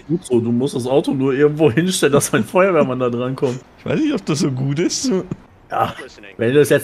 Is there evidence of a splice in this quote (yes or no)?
yes